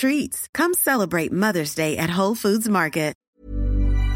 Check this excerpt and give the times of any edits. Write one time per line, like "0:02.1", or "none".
0:03.2